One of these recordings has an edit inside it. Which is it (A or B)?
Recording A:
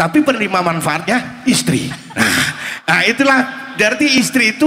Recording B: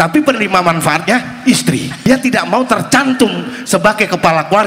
B